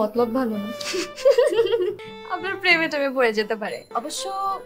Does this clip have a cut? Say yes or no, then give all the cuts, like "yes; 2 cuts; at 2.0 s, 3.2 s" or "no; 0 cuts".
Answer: yes; 2 cuts; at 2.1 s, 3.9 s